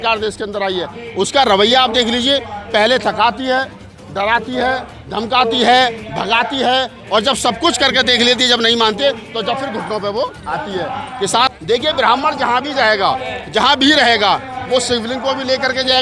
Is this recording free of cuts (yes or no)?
no